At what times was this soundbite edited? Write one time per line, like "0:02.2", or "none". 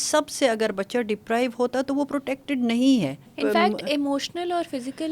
0:03.3